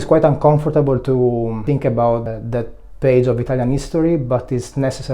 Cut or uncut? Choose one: cut